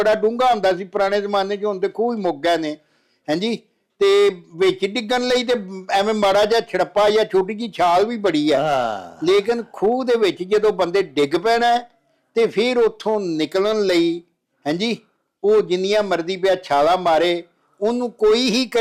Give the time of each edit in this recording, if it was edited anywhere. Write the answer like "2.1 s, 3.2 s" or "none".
none